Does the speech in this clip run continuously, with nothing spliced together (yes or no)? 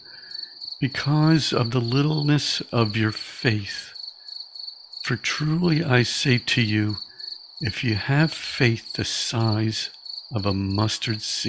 yes